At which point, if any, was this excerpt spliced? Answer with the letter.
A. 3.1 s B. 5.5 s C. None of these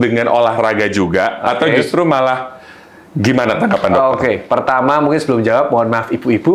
C